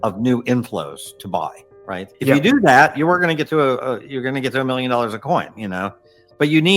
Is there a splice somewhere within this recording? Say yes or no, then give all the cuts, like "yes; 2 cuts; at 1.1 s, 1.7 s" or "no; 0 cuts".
yes; 1 cut; at 2.1 s